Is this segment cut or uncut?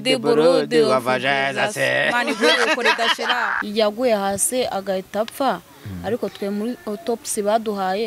cut